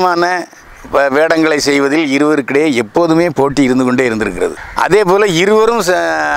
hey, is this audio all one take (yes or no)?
yes